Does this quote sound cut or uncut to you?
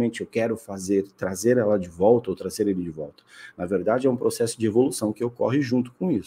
uncut